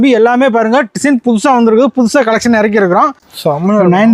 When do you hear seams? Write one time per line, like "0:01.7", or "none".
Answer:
0:03.2